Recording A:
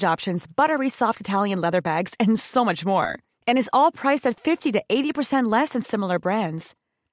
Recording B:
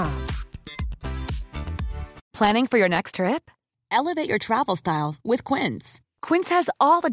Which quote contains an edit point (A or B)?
B